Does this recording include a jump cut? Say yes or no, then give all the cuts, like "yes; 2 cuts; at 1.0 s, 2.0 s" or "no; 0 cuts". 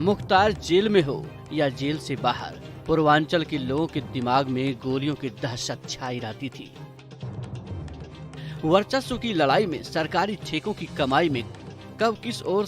yes; 2 cuts; at 6.6 s, 8.6 s